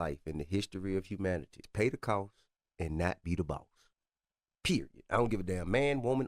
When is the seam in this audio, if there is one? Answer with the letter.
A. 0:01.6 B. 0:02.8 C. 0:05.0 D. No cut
A